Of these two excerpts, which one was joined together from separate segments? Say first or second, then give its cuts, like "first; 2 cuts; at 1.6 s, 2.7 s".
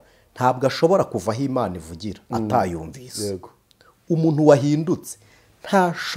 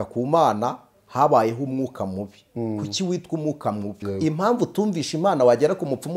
second; 1 cut; at 4.0 s